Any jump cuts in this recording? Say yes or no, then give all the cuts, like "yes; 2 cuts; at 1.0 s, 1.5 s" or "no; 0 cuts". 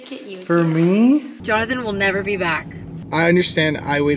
yes; 2 cuts; at 1.3 s, 3.0 s